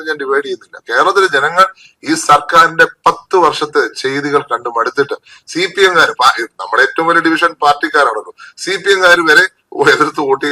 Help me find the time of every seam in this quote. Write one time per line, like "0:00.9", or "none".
none